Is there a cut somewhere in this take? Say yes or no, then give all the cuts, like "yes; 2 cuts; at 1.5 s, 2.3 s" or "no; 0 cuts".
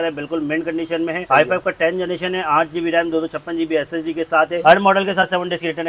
yes; 2 cuts; at 1.2 s, 4.6 s